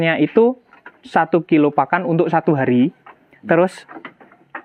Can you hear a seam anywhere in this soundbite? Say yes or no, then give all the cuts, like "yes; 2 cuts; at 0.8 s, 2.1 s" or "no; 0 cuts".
no; 0 cuts